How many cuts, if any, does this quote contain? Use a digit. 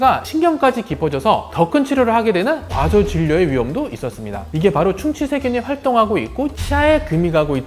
1